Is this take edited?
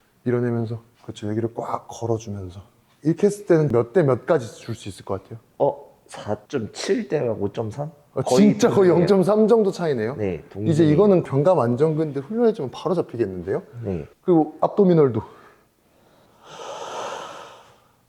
no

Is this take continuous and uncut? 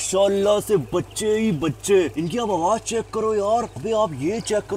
yes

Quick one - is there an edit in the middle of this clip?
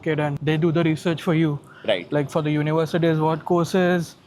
no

